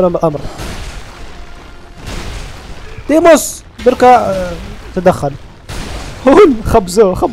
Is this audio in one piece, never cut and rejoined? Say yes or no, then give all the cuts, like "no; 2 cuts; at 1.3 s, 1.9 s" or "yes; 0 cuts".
yes; 0 cuts